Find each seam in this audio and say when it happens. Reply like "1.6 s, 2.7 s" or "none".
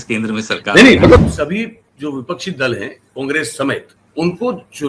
1.2 s, 4.0 s